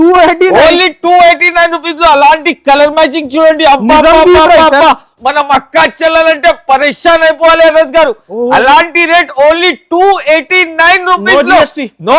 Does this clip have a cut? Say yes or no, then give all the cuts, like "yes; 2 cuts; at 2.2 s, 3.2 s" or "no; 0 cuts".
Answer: no; 0 cuts